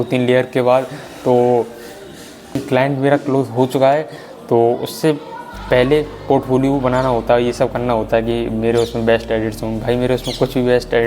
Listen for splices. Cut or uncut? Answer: cut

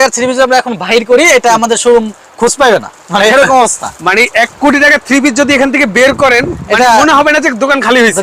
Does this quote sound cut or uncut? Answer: uncut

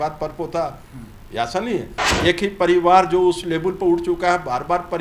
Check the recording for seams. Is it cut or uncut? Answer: cut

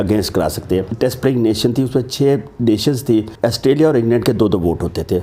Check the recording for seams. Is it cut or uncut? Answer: cut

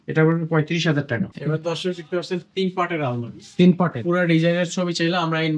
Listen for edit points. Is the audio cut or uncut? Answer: cut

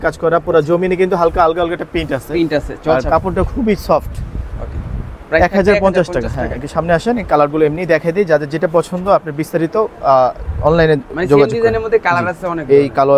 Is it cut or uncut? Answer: uncut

